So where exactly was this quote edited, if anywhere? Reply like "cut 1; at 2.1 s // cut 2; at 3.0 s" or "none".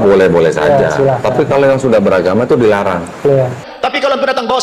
cut 1; at 3.7 s

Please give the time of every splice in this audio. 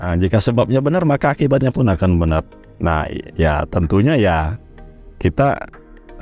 none

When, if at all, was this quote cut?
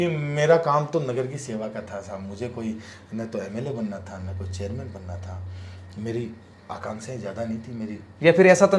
none

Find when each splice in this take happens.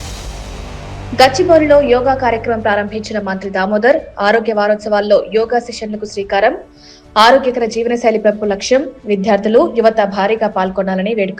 cut 1; at 1.1 s

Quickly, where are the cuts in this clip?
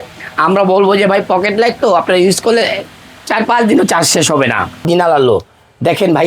cut 1; at 4.9 s

